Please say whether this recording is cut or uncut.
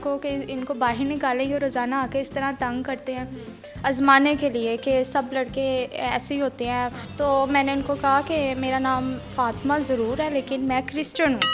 cut